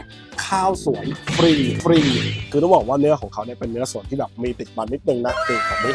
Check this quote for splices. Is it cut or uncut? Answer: cut